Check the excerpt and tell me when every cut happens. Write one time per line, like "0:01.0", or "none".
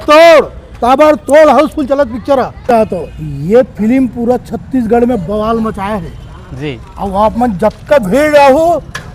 0:02.7